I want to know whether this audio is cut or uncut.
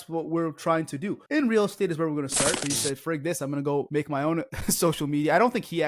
cut